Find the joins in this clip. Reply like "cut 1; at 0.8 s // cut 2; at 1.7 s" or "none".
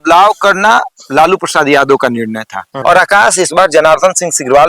cut 1; at 2.6 s